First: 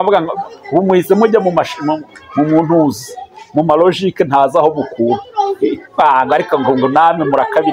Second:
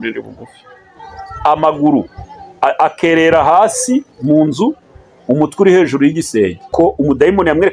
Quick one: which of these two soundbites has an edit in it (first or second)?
second